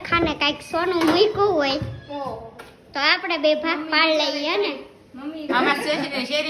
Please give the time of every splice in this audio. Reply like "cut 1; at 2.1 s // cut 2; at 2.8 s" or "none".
cut 1; at 5.5 s